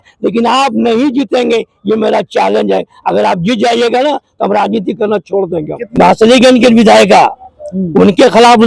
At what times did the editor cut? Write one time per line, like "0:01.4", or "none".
0:05.8